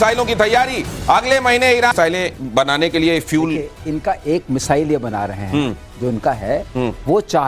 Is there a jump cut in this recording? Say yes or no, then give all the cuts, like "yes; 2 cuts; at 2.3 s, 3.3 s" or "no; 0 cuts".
yes; 1 cut; at 1.9 s